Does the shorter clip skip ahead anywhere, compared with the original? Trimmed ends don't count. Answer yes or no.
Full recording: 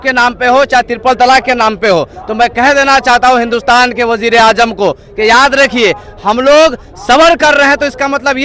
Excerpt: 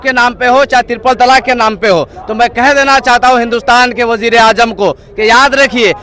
no